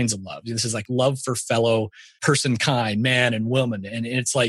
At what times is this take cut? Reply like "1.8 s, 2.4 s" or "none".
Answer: 0.8 s, 2.2 s